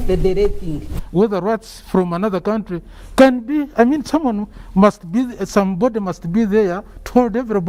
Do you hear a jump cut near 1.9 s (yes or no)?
no